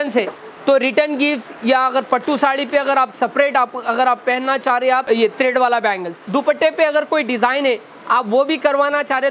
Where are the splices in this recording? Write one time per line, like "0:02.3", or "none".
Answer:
0:05.0
0:06.2